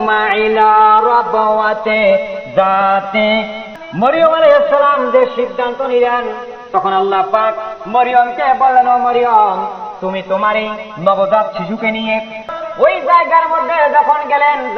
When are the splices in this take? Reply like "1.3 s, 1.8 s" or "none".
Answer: 3.6 s, 12.5 s